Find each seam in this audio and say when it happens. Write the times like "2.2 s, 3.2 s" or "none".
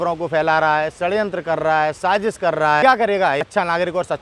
2.8 s, 3.5 s